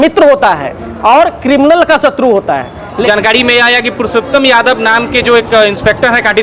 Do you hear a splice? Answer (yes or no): yes